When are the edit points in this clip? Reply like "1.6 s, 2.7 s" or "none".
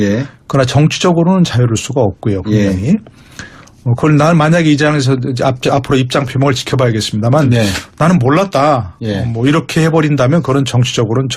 none